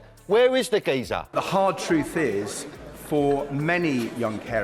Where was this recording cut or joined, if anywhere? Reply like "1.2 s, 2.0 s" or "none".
1.3 s